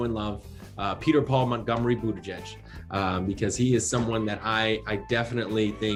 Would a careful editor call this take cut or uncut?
uncut